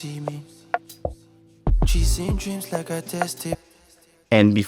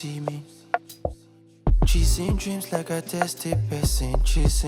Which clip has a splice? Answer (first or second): second